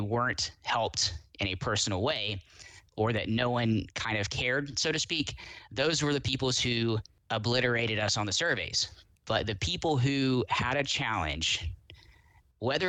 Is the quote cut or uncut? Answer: cut